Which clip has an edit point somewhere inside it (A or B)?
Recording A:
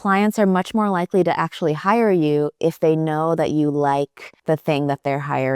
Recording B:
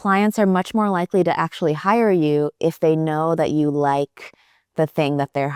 A